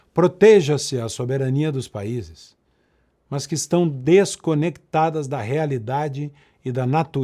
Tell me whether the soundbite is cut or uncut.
uncut